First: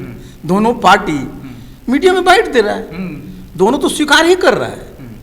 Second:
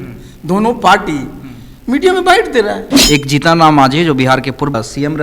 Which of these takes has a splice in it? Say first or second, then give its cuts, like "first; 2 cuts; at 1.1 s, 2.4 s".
second; 1 cut; at 2.9 s